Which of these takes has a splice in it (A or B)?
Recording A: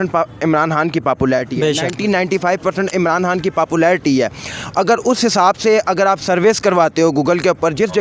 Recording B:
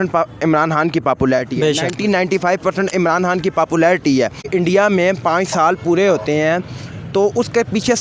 B